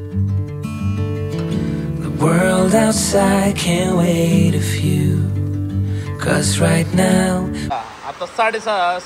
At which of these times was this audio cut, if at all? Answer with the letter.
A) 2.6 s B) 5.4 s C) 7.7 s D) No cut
C